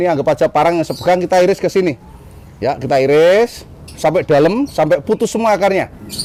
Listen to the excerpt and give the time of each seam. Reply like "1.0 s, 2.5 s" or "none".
none